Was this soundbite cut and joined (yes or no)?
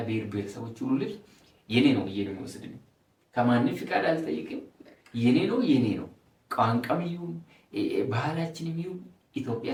no